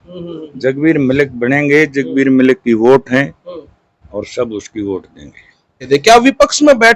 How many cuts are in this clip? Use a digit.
1